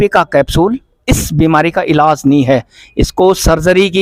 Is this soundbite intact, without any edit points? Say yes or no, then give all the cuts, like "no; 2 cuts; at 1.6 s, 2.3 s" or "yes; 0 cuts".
yes; 0 cuts